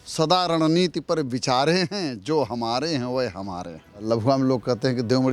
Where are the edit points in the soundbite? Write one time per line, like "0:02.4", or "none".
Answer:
0:04.0